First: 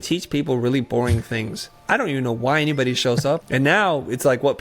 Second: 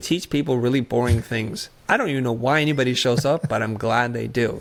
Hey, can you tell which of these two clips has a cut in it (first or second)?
first